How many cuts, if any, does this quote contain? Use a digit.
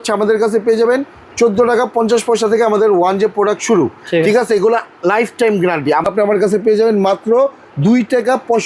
1